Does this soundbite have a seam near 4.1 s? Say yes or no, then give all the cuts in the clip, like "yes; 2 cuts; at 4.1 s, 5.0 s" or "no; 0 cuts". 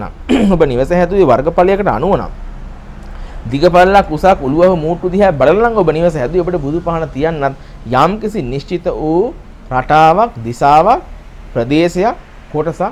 no; 0 cuts